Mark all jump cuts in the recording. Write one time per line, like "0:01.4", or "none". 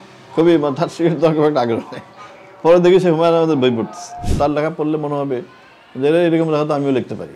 0:04.3